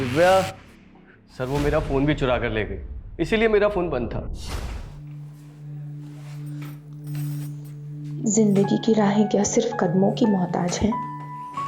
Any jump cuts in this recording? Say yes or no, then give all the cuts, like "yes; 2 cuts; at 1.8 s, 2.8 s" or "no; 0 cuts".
yes; 1 cut; at 4.7 s